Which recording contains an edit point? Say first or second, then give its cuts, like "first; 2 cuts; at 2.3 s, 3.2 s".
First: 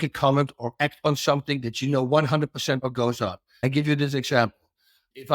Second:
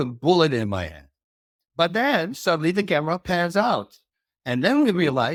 first; 1 cut; at 3.5 s